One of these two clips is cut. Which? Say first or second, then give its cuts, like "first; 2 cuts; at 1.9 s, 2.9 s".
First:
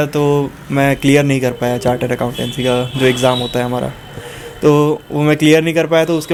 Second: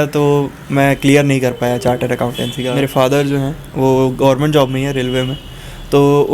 second; 1 cut; at 2.7 s